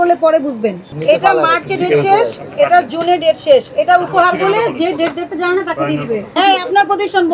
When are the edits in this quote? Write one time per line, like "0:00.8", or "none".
0:01.0
0:06.3